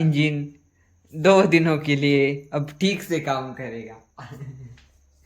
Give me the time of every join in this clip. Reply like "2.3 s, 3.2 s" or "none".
none

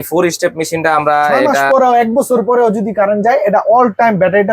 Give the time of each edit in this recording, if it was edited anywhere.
1.7 s

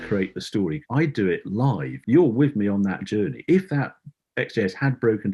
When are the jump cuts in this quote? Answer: 0.8 s, 1.9 s

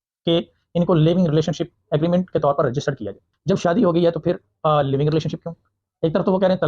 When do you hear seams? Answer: 3.2 s

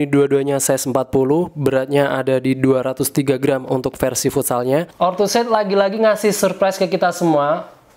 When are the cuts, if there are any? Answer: 4.9 s

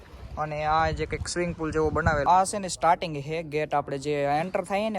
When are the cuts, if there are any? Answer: 2.2 s

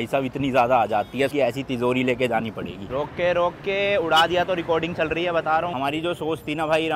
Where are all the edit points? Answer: 1.3 s, 2.9 s, 5.7 s

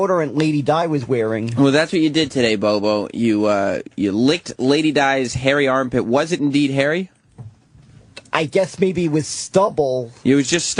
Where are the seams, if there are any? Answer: none

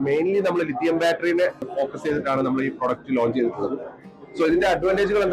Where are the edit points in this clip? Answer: 1.7 s

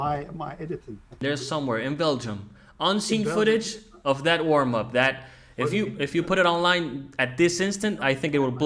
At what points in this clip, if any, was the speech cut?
1.2 s

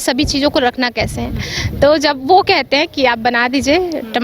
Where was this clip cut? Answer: 1.5 s

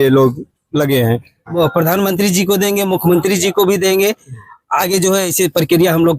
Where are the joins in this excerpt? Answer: 1.4 s

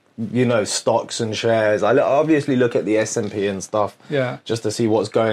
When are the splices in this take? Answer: none

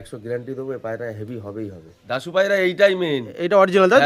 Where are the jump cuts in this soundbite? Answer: 2.0 s

